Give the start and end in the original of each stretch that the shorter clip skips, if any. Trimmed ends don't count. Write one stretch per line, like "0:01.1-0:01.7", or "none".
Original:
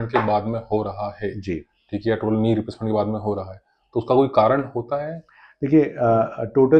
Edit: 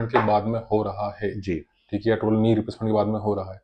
none